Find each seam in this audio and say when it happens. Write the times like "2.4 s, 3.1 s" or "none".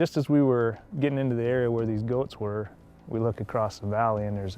0.9 s, 2.9 s